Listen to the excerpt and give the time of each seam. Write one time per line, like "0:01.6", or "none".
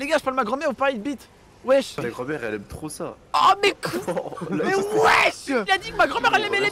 0:02.0
0:05.6